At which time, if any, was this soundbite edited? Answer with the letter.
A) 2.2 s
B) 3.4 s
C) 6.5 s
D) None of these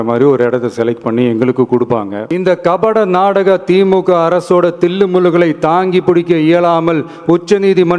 A